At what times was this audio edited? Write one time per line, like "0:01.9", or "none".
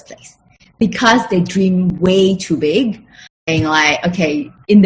0:03.4